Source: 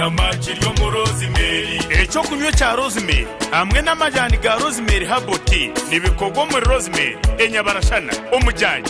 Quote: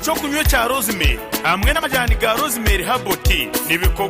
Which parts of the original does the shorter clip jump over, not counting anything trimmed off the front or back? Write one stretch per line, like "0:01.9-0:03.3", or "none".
0:03.9-0:04.0